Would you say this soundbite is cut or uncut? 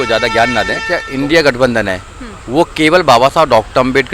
cut